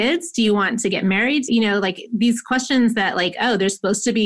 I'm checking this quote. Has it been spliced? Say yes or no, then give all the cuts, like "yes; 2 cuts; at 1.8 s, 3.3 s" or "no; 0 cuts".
yes; 1 cut; at 1.5 s